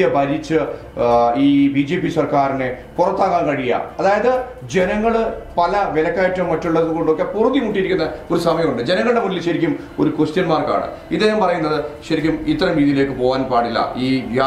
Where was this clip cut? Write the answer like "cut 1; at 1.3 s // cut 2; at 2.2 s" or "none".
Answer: none

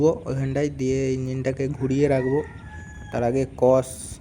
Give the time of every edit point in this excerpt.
none

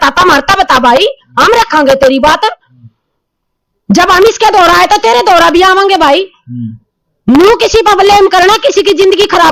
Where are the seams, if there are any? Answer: none

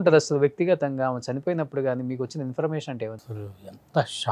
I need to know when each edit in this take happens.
cut 1; at 3.2 s

